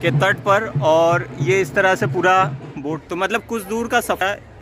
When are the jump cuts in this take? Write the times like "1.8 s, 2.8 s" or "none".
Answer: 3.0 s